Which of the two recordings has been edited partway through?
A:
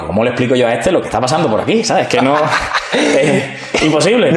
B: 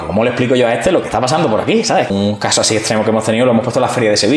B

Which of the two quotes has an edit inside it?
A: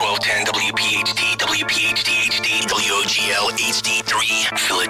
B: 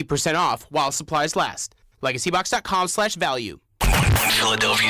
B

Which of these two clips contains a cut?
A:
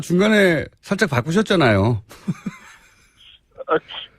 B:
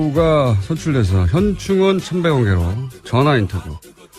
A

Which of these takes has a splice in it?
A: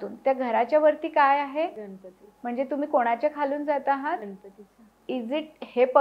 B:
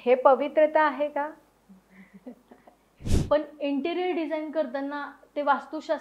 B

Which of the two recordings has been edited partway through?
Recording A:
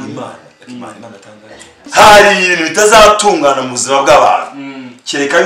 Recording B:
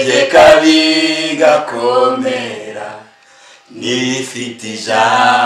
A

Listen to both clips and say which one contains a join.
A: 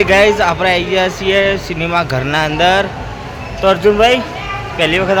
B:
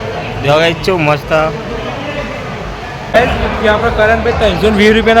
B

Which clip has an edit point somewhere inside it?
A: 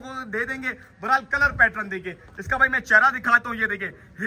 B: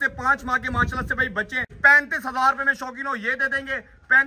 B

